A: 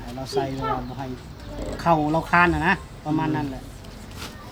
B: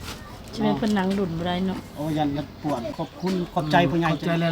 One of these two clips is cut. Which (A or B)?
B